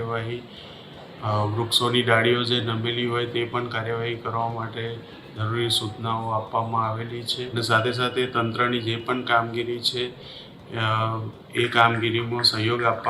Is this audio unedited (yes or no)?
no